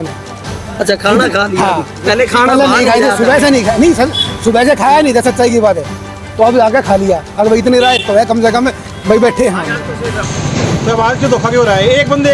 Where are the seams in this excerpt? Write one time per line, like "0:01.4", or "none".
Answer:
0:10.2